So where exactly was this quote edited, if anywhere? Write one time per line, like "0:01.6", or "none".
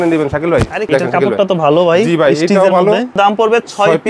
0:00.9
0:03.2

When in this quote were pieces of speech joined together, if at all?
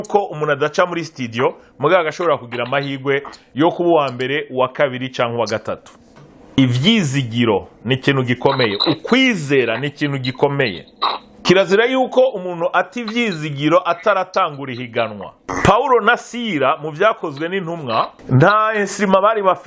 0:06.6
0:11.4
0:15.5
0:18.2

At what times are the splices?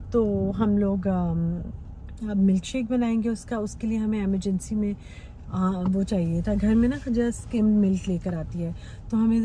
none

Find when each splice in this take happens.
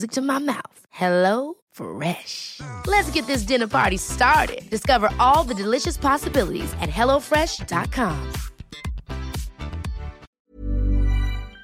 0:10.3

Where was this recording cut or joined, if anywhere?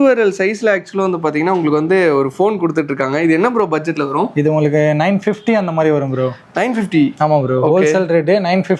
none

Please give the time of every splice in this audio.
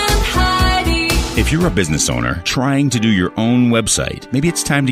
0:01.2

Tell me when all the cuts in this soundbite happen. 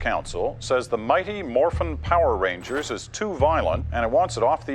0:03.9

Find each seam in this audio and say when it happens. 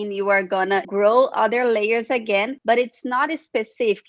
0:00.9
0:02.5

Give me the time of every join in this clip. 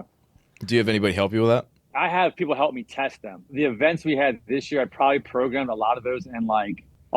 0:01.8
0:03.5

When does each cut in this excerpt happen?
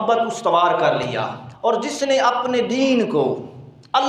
0:01.4

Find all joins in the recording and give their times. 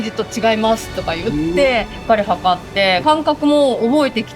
0:01.9
0:03.0

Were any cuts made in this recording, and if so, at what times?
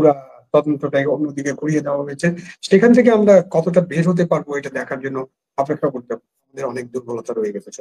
0:06.5

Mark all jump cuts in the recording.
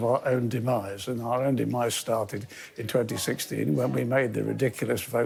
none

